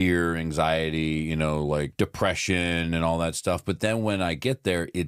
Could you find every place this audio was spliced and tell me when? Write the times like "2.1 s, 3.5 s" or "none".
1.9 s